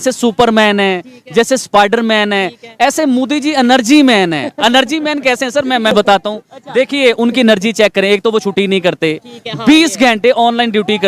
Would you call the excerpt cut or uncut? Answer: uncut